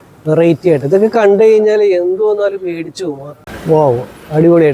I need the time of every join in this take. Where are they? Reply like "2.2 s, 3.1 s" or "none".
3.4 s